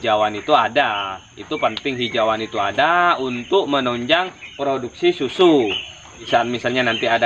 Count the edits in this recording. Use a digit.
1